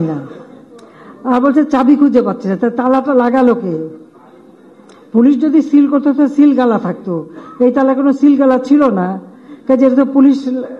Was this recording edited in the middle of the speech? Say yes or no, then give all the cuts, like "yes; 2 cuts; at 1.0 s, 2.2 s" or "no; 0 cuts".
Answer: no; 0 cuts